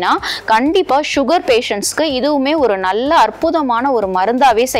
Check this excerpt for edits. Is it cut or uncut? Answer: uncut